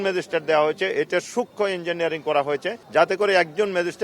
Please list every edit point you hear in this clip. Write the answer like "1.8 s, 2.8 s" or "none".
2.8 s